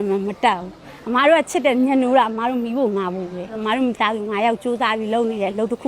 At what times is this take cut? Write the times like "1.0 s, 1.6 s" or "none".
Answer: 3.6 s